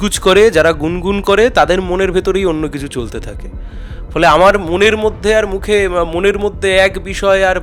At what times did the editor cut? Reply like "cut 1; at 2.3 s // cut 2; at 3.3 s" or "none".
none